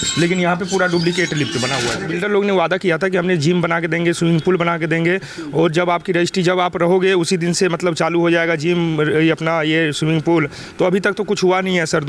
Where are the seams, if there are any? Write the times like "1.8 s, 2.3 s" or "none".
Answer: 2.0 s